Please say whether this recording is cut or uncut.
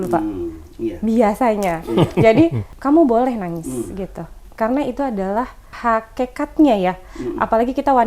cut